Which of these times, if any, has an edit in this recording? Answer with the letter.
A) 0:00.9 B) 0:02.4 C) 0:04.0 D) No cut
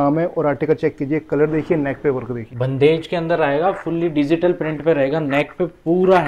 B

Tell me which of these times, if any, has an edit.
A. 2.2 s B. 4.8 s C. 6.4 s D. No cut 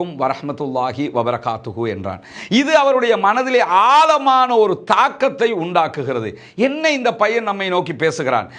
D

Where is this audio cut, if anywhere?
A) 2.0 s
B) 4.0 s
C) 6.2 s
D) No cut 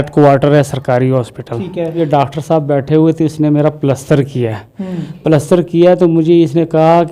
A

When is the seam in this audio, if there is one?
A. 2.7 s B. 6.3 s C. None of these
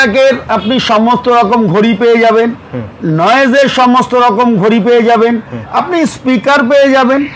C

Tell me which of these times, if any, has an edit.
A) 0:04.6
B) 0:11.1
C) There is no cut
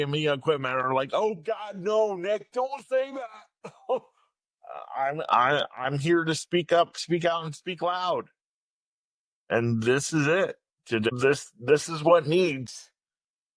B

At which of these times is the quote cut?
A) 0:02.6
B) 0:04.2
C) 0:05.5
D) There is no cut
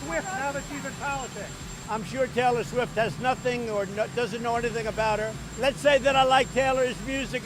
C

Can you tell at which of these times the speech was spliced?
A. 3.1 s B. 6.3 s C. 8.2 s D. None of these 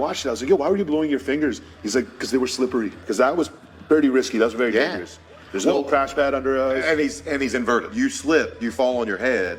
A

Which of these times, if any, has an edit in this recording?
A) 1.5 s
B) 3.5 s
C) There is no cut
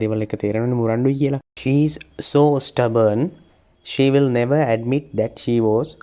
A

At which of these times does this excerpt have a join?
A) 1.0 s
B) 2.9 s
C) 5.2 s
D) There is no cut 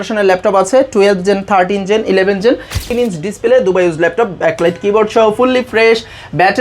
B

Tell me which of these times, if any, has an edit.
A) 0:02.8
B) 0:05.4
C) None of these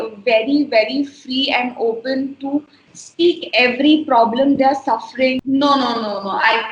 B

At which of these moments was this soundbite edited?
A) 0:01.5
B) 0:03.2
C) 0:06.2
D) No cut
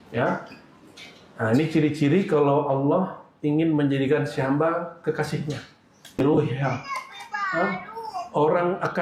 C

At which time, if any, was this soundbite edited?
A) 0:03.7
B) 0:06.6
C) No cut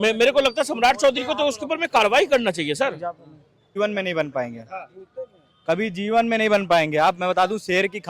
A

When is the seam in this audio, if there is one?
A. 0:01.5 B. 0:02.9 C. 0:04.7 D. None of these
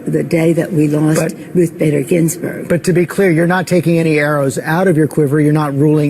D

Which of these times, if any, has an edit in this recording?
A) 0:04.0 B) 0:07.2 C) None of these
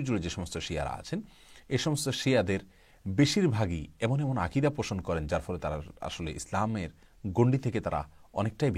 C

